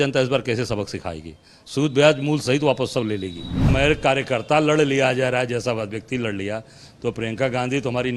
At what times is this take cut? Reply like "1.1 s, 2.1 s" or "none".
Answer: 3.7 s